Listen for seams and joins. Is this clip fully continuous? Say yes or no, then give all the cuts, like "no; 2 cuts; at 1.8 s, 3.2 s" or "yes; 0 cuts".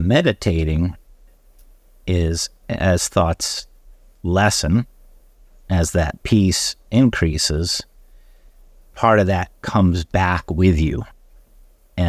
yes; 0 cuts